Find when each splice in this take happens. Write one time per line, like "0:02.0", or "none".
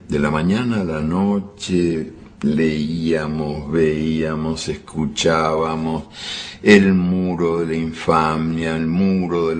0:05.1